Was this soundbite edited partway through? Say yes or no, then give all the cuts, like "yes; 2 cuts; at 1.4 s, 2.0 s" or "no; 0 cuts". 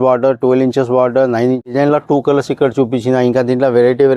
yes; 1 cut; at 1.7 s